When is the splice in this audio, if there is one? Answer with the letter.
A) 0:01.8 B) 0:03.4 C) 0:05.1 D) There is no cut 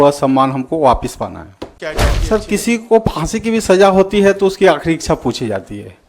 A